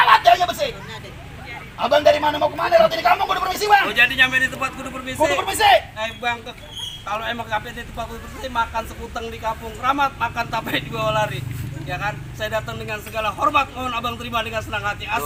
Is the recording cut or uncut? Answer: uncut